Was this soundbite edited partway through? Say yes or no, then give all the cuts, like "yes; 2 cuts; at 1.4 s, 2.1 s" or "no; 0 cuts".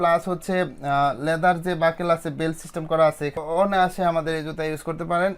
yes; 1 cut; at 3.4 s